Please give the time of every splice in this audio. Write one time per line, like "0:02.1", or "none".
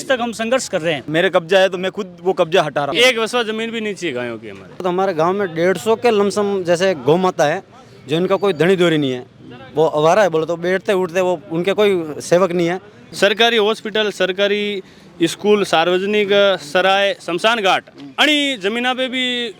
0:01.1
0:02.9
0:04.8
0:13.1